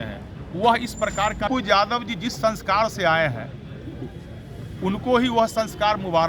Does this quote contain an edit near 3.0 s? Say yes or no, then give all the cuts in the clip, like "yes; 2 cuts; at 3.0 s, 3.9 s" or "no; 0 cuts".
no; 1 cut; at 1.5 s